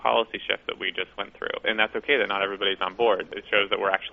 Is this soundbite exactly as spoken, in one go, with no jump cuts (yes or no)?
yes